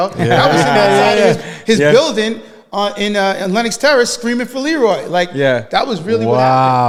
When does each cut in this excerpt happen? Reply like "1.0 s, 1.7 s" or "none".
none